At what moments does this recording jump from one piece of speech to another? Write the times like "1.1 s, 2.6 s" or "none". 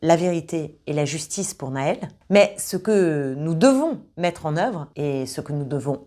2.1 s, 4.9 s